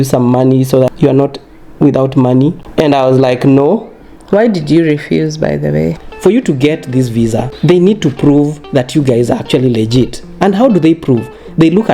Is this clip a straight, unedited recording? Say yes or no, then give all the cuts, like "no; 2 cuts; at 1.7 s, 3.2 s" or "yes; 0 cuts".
no; 3 cuts; at 0.9 s, 2.6 s, 6.0 s